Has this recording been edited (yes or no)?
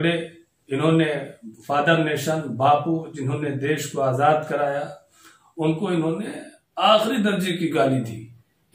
no